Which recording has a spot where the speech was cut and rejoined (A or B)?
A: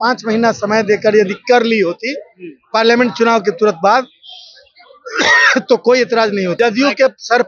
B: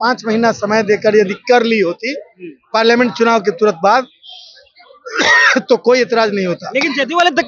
A